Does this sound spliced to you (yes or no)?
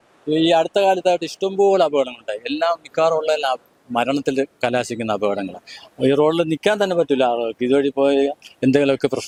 no